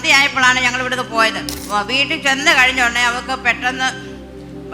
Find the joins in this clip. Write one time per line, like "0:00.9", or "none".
0:01.6